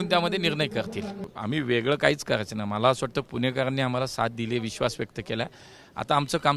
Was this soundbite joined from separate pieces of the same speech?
yes; 1 cut; at 1.3 s

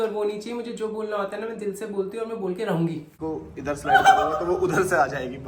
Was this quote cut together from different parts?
yes; 1 cut; at 3.1 s

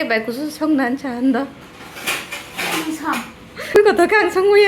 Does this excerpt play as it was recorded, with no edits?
no; 1 cut; at 3.8 s

